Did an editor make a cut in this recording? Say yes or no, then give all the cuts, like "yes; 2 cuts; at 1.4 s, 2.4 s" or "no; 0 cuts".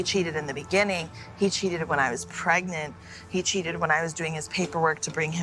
no; 0 cuts